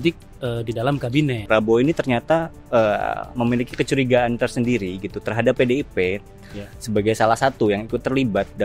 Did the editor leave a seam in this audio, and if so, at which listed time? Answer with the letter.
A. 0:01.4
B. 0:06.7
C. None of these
A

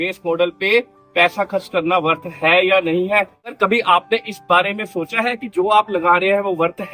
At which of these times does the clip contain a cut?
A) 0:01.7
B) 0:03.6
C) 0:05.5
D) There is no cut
B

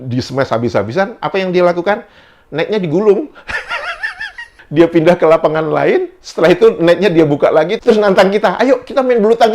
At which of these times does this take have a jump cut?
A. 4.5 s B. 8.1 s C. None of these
A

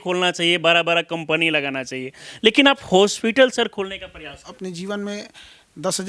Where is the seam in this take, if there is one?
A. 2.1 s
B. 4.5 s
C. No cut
B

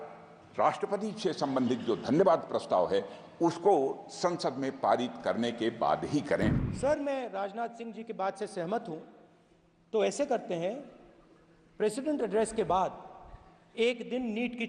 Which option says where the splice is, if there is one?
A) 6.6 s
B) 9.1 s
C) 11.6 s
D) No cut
A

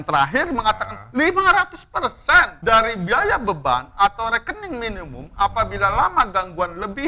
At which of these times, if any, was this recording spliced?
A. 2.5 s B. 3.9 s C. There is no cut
A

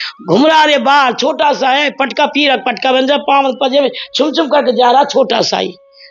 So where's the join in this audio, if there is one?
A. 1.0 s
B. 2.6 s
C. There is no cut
C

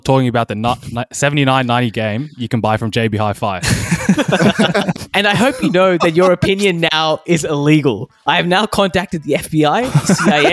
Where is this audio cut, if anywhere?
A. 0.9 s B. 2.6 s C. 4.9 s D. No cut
C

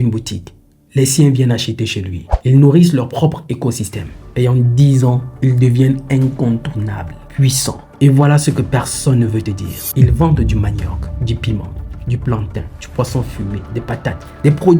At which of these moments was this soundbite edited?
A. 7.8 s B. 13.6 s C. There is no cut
A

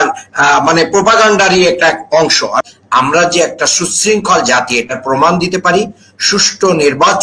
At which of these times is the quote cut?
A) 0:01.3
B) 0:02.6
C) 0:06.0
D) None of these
B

